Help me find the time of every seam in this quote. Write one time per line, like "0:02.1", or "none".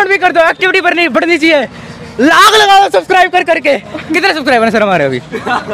none